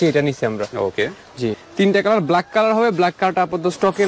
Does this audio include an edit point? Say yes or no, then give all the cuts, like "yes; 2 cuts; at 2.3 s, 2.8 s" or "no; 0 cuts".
yes; 1 cut; at 1.6 s